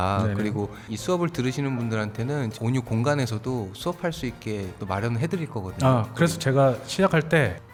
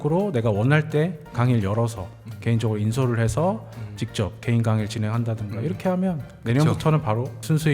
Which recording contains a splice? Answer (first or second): second